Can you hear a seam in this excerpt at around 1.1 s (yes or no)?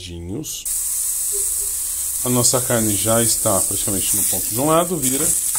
yes